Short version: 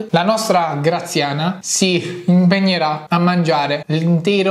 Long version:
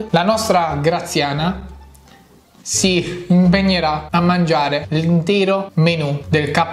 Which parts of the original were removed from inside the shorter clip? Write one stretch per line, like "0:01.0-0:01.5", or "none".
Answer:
0:01.6-0:02.7

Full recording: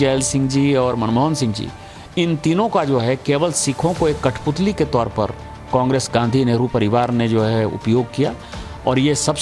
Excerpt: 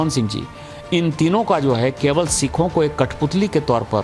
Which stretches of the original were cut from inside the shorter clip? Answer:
none

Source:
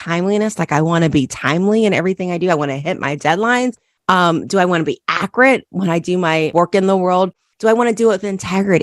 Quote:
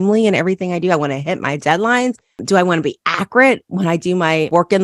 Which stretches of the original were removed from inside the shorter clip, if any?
0:04.0-0:04.4

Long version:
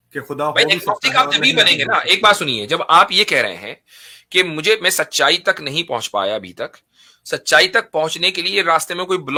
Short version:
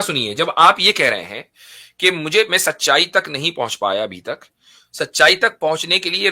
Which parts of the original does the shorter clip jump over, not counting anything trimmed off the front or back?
none

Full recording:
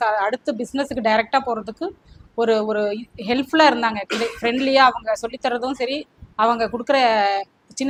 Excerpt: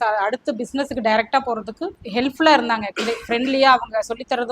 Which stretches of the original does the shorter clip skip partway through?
0:02.0-0:03.1

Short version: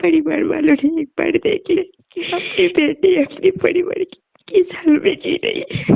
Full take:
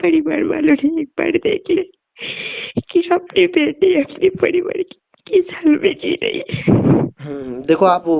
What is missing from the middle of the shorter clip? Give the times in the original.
0:02.4-0:03.2

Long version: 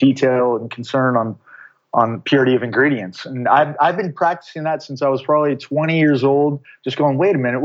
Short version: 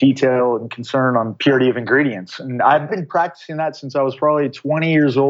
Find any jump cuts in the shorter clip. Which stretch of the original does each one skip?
0:01.3-0:02.2
0:03.7-0:03.9

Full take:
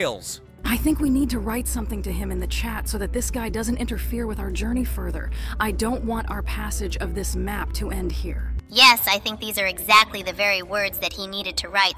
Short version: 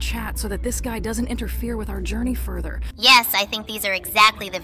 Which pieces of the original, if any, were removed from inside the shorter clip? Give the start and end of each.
0:05.3-0:08.5

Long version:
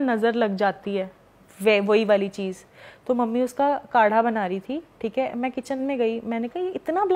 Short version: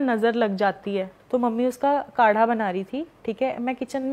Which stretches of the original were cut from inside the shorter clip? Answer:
0:01.1-0:02.9

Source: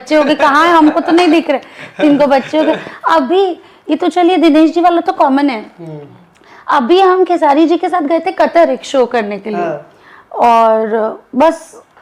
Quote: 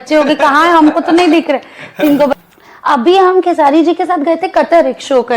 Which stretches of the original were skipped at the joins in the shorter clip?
0:02.3-0:06.1

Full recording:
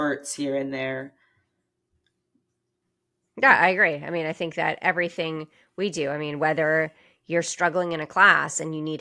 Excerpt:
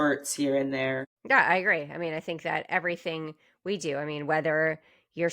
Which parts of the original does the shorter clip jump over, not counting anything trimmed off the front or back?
0:01.1-0:03.3

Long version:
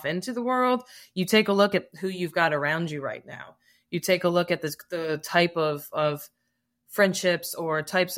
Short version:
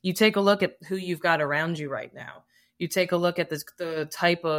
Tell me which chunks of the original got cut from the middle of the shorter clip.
none

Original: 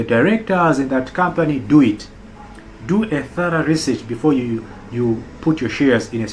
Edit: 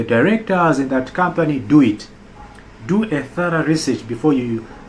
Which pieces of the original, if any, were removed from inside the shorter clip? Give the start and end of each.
none

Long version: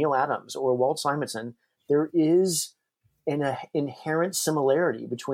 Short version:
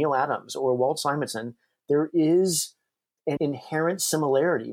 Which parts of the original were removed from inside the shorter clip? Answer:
0:03.4-0:03.7

